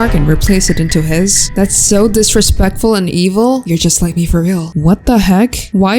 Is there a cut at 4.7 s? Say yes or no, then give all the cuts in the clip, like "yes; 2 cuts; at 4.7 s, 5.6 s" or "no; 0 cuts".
yes; 1 cut; at 4.7 s